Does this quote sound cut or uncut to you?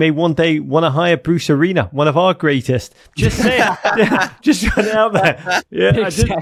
uncut